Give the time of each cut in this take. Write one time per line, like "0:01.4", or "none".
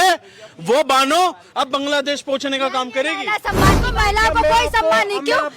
0:03.9